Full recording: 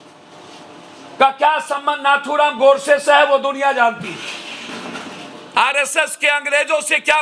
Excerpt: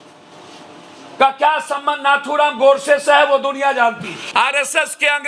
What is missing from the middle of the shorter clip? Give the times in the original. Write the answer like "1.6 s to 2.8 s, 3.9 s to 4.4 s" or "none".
4.1 s to 5.3 s